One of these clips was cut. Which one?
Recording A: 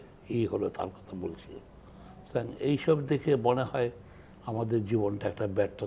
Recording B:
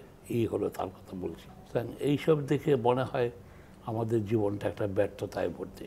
B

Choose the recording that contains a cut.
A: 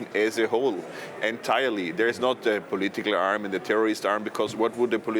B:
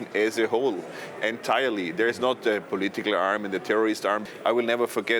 B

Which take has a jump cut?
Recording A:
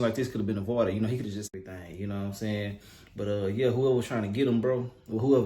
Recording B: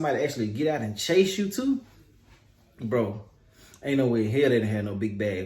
A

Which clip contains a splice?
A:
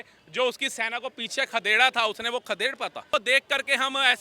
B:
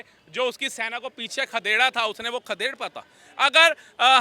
A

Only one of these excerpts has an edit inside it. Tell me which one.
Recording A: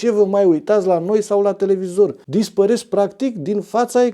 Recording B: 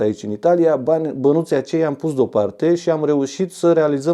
A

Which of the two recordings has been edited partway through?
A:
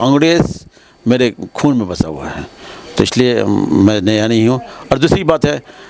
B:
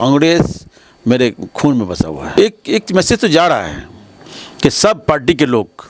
B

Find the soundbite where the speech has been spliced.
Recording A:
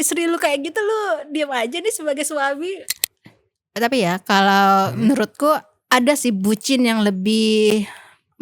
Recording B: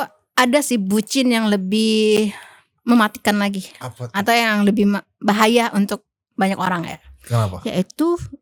A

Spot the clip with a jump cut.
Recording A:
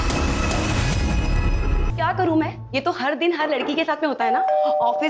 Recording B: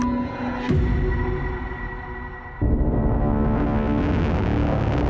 A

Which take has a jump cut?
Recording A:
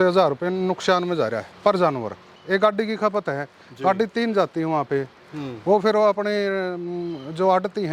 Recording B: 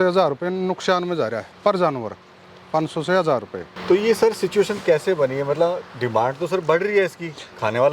A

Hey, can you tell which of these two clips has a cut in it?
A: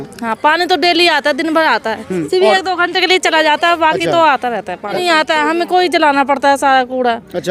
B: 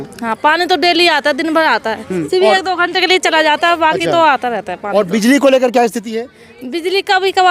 A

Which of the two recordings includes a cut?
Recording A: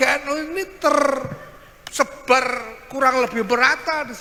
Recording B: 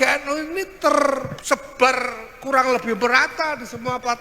B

